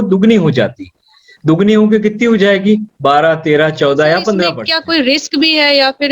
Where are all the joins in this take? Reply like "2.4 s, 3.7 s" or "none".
4.7 s